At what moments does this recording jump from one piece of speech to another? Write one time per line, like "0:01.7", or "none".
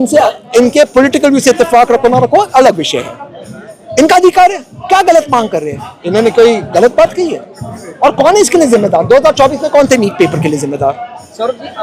none

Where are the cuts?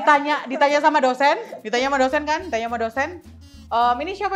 none

